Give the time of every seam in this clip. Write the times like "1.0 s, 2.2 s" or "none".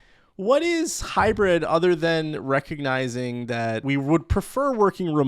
3.8 s